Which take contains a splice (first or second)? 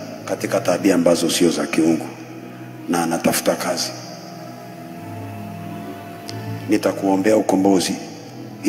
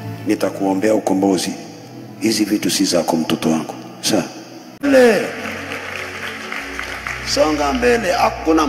second